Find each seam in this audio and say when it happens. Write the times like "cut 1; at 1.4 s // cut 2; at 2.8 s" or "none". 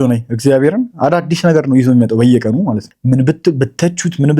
cut 1; at 2.9 s

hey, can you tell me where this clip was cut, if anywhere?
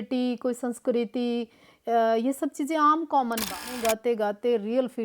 cut 1; at 3.7 s

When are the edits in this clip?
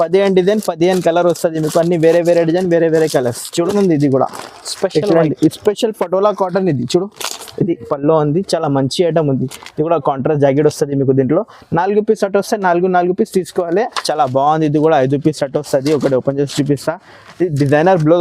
cut 1; at 3.4 s // cut 2; at 14.0 s

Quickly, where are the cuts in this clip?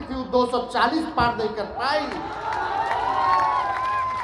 none

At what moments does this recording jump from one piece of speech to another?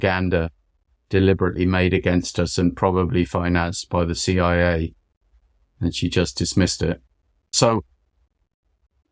none

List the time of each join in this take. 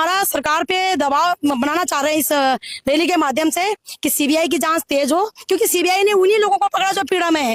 none

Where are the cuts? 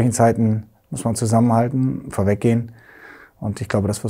none

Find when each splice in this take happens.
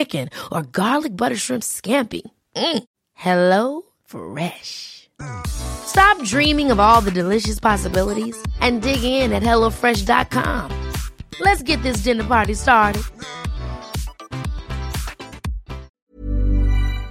cut 1; at 15.9 s

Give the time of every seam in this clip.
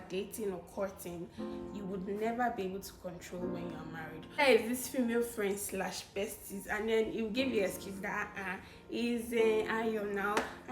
cut 1; at 4.4 s

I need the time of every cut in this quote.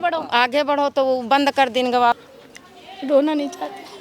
cut 1; at 2.2 s

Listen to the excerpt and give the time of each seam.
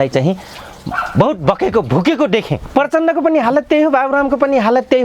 cut 1; at 2.7 s

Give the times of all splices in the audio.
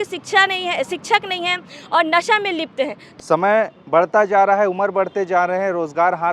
cut 1; at 3.1 s

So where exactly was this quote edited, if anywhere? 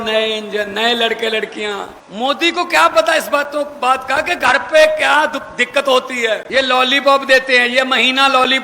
cut 1; at 2.0 s // cut 2; at 6.4 s

